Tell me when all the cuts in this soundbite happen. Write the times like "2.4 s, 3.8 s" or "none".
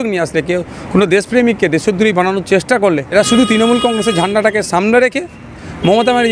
3.1 s